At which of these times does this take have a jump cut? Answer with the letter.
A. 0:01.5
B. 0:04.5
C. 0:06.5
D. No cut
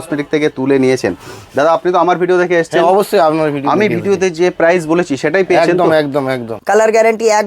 C